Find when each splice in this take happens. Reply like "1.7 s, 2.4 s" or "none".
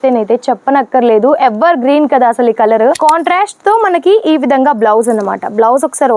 2.9 s